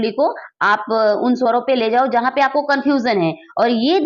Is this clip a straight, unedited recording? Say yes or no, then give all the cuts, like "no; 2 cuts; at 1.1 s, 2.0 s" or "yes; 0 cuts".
yes; 0 cuts